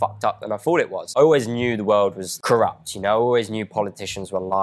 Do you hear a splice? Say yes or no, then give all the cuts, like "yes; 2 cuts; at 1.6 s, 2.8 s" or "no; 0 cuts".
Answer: yes; 2 cuts; at 1.0 s, 2.3 s